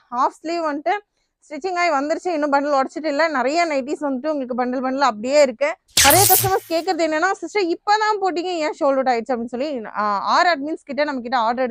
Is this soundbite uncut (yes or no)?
no